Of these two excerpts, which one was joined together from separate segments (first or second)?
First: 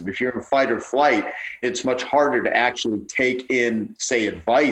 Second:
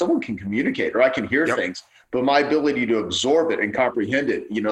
first